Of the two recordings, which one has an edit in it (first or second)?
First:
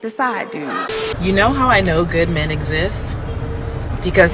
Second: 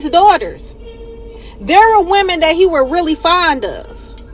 first